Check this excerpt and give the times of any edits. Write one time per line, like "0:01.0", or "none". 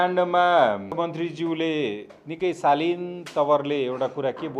0:00.9